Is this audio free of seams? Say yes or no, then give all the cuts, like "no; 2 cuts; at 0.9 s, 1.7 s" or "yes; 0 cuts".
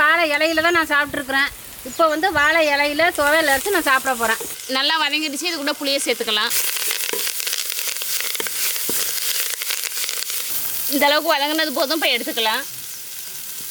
yes; 0 cuts